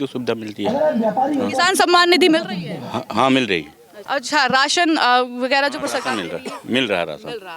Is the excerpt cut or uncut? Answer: uncut